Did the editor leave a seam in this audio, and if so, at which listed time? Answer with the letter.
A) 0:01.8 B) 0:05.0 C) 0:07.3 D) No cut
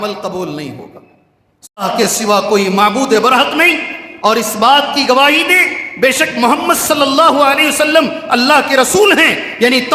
A